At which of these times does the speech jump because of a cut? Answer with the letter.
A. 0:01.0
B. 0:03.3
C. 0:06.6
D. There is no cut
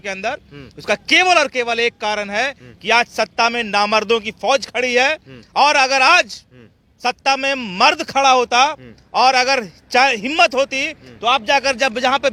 D